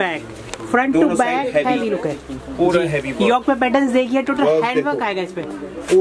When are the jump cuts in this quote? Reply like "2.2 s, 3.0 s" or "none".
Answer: none